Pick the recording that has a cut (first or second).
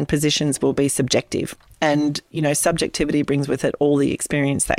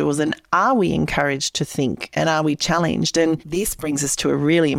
second